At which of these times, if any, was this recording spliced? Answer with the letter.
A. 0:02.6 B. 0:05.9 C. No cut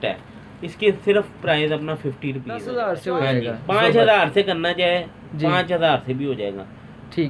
A